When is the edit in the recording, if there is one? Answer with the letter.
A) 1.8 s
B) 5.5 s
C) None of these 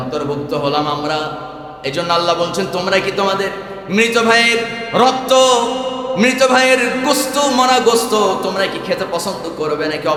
C